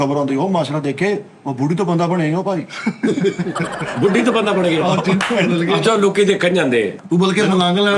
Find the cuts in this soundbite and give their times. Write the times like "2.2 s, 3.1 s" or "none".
7.0 s